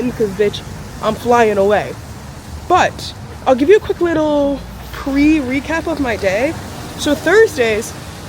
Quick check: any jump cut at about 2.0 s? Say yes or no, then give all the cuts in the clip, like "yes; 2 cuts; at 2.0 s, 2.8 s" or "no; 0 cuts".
no; 0 cuts